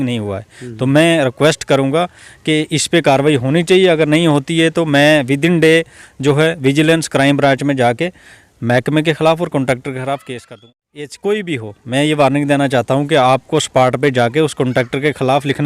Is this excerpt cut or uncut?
cut